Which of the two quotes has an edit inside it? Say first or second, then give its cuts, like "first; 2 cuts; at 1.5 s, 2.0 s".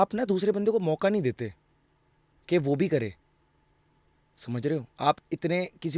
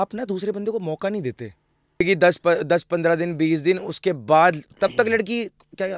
second; 1 cut; at 2.0 s